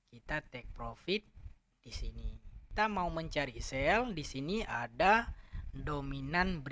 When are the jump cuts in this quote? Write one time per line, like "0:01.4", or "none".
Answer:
0:02.6